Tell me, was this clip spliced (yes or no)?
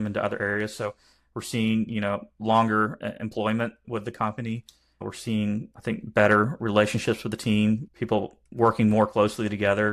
yes